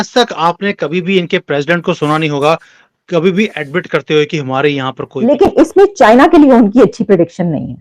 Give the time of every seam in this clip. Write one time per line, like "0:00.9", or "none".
0:05.1

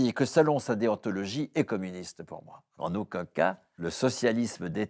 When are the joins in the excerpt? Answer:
0:02.8
0:03.8

